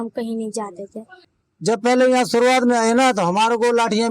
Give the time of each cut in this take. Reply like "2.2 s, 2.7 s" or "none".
1.0 s